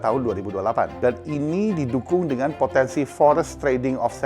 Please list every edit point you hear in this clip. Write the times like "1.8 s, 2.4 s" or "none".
0.9 s